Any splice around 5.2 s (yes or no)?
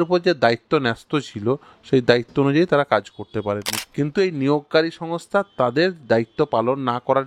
no